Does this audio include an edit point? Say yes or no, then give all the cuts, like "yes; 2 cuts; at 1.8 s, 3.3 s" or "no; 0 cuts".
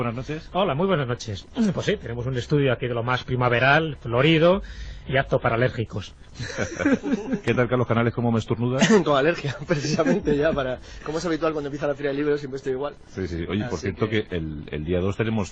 yes; 1 cut; at 4.0 s